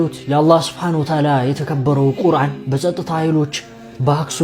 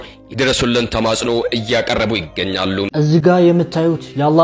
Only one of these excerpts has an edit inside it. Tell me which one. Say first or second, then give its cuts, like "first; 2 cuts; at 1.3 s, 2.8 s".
second; 1 cut; at 2.9 s